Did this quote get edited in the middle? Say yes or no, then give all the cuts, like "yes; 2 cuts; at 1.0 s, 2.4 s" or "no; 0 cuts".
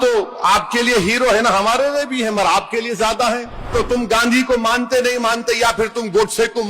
yes; 1 cut; at 3.7 s